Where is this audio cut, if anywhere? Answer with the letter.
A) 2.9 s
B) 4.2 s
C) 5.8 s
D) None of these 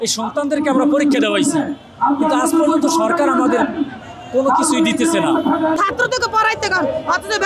C